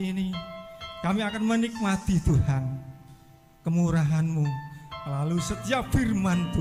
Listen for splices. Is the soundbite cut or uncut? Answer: uncut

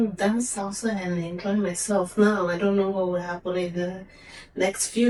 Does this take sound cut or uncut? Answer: uncut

